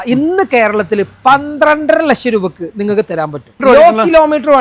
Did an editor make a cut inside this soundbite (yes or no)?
yes